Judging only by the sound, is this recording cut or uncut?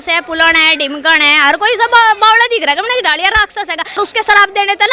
cut